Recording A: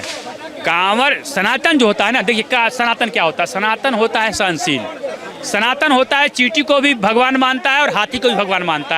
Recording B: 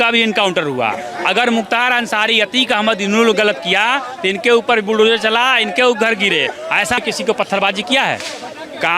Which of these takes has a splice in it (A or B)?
B